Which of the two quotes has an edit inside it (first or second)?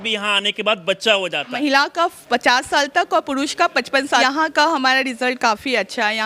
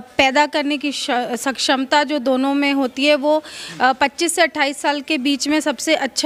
first